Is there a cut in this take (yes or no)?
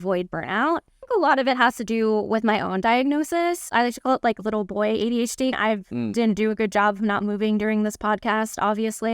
yes